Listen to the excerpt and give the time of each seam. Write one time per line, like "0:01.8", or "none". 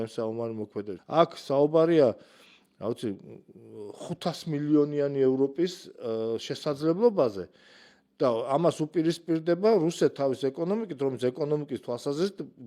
0:01.0